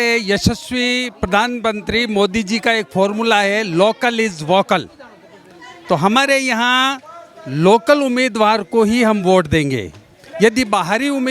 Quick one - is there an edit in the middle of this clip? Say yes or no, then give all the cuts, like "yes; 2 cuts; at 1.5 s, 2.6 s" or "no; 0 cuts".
no; 0 cuts